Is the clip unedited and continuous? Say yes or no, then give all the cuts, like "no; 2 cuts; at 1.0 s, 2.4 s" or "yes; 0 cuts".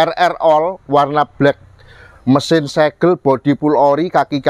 yes; 0 cuts